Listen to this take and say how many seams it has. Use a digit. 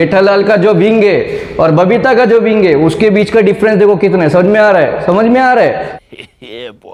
1